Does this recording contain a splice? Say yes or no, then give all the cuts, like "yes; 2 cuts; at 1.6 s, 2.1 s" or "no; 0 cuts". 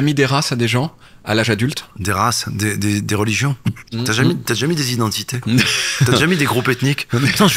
no; 0 cuts